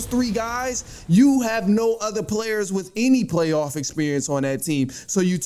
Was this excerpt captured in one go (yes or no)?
yes